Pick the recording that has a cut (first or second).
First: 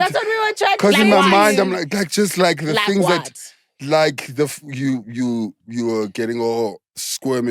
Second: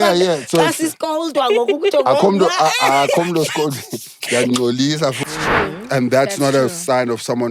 second